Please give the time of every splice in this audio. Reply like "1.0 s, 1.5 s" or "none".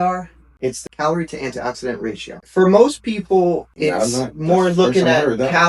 0.8 s, 2.4 s, 3.7 s